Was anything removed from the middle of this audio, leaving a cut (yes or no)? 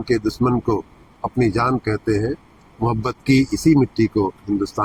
no